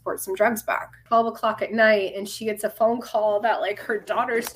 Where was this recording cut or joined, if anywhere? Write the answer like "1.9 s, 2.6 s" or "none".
0.9 s